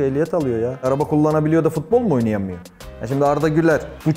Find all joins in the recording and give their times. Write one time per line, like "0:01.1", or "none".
none